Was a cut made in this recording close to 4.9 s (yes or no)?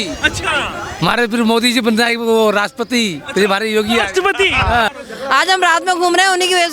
yes